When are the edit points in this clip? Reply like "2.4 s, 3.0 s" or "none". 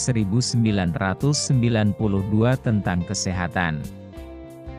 3.9 s